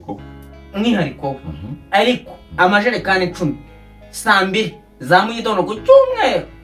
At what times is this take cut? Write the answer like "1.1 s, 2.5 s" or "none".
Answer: none